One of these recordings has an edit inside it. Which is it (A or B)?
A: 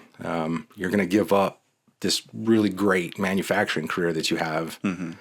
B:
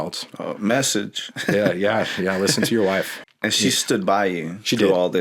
B